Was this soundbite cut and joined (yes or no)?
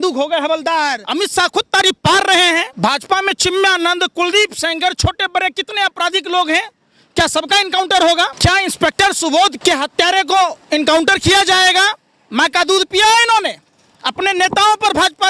yes